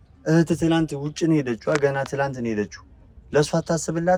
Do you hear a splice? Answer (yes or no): no